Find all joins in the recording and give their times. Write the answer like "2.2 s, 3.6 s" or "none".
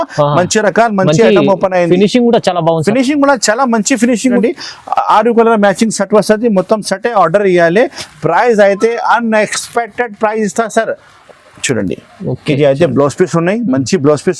4.4 s, 11.1 s